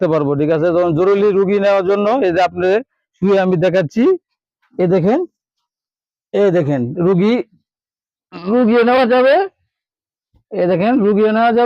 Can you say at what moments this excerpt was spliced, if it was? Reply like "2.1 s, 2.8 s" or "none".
none